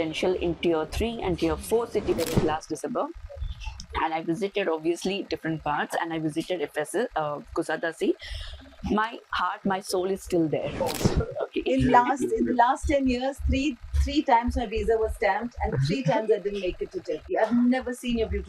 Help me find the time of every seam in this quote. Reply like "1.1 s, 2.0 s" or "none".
2.1 s, 10.8 s